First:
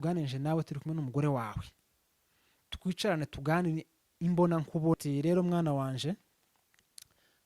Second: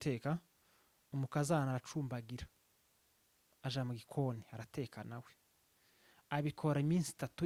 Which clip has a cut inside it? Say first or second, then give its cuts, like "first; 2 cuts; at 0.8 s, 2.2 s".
first; 1 cut; at 5.0 s